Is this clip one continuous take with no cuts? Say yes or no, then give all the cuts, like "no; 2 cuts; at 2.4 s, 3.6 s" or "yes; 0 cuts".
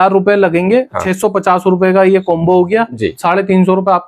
no; 1 cut; at 1.0 s